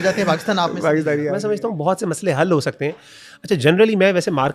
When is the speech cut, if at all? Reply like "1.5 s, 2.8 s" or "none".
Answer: 1.3 s

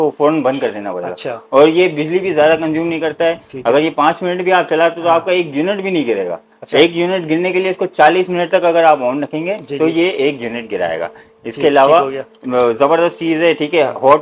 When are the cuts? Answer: none

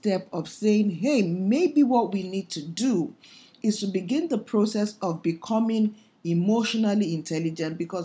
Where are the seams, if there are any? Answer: none

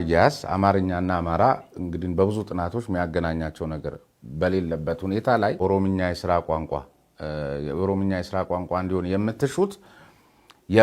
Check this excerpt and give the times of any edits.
5.6 s

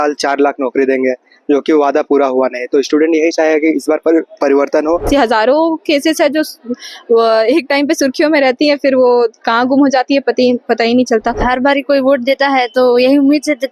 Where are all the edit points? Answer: 5.1 s, 11.4 s

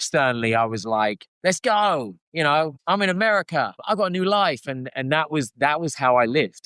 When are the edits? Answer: 1.3 s, 2.8 s, 3.8 s

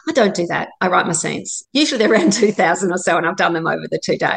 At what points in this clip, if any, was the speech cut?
1.6 s

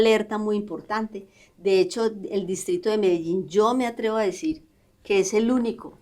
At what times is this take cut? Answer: none

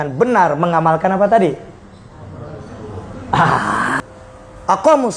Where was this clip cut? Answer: 3.9 s

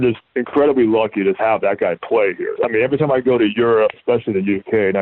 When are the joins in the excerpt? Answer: 1.4 s, 2.5 s, 3.9 s

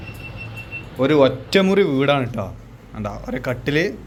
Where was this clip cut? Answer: none

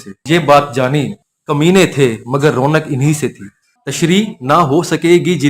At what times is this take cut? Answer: 3.8 s

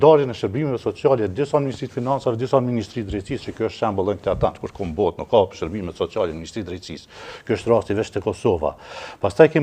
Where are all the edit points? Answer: none

